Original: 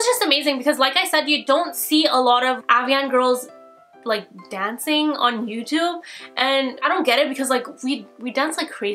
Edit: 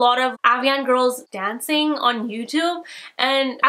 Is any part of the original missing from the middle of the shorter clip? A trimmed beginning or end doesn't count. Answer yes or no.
yes